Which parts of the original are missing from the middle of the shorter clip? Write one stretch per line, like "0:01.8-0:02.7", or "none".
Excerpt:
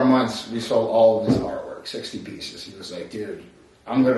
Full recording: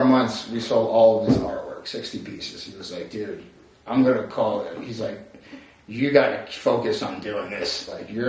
none